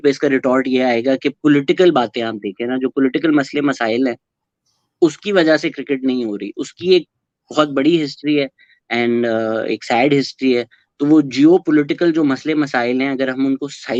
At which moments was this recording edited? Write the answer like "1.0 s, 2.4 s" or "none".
none